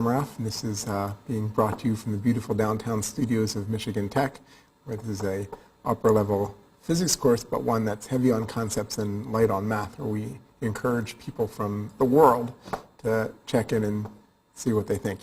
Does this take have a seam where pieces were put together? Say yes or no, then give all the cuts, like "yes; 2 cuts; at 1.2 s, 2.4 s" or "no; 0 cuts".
yes; 1 cut; at 5.0 s